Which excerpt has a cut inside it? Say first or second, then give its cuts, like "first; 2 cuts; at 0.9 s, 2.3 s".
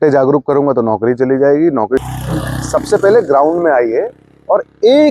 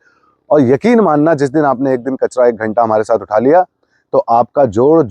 first; 1 cut; at 2.0 s